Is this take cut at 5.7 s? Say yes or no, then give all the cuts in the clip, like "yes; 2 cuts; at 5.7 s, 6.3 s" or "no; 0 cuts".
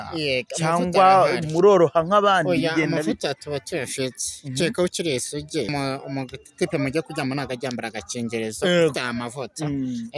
yes; 1 cut; at 5.7 s